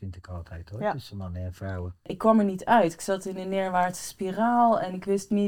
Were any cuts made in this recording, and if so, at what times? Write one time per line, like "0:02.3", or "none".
0:02.1